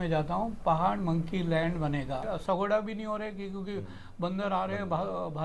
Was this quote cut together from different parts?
yes; 1 cut; at 2.2 s

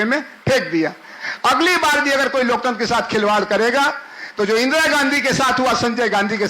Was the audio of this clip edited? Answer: yes; 1 cut; at 1.2 s

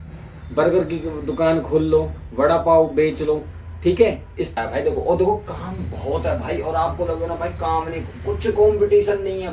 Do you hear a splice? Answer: yes; 1 cut; at 4.5 s

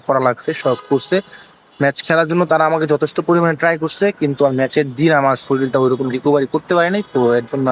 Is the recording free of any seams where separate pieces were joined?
yes; 0 cuts

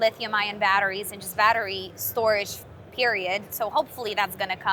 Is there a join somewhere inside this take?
no; 0 cuts

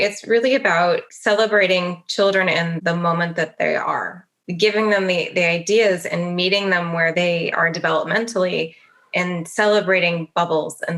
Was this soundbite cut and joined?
yes; 3 cuts; at 1.1 s, 2.7 s, 7.1 s

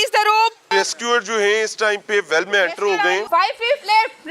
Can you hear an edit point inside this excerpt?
yes; 2 cuts; at 0.7 s, 3.2 s

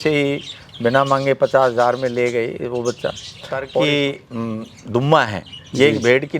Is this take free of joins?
no; 1 cut; at 3.7 s

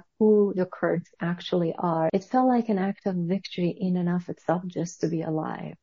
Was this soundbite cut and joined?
yes; 1 cut; at 2.1 s

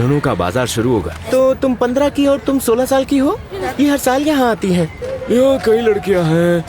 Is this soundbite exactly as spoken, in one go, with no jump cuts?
no; 3 cuts; at 1.2 s, 3.6 s, 5.1 s

